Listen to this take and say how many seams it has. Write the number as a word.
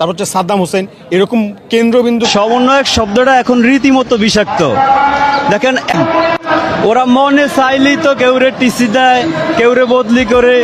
one